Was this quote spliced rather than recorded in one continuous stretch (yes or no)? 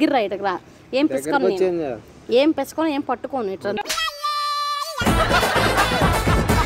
no